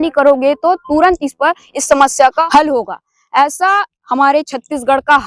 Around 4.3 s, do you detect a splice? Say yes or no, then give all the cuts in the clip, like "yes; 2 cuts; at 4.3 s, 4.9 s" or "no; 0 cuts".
no; 1 cut; at 2.4 s